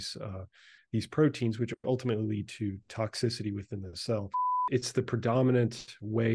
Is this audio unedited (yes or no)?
no